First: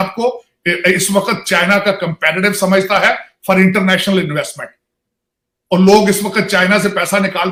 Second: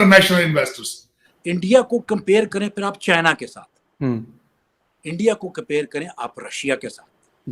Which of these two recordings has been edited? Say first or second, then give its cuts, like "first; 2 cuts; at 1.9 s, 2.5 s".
second; 1 cut; at 1.3 s